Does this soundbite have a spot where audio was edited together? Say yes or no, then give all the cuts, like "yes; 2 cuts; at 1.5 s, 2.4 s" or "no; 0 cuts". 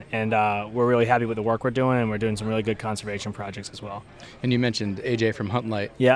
no; 0 cuts